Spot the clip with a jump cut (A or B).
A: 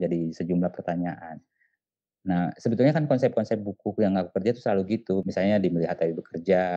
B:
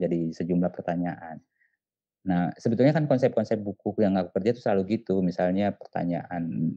A